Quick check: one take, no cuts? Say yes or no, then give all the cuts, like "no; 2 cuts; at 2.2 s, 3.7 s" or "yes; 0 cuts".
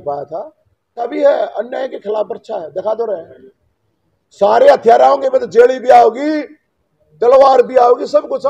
no; 1 cut; at 1.1 s